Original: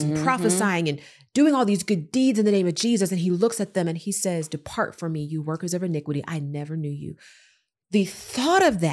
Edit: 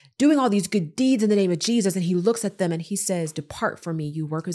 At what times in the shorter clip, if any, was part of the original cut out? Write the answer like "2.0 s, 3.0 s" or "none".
none